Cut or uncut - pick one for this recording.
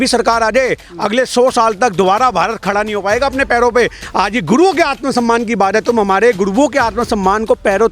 cut